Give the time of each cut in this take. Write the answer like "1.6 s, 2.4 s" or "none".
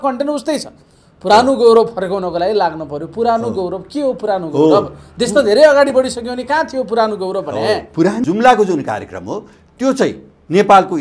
8.2 s